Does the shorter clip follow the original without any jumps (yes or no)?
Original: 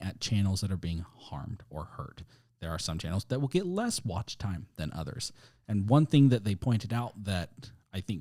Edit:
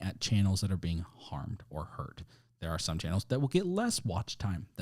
yes